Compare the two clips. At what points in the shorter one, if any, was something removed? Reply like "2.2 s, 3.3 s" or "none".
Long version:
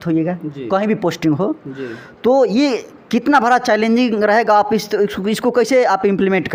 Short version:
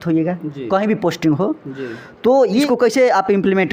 2.7 s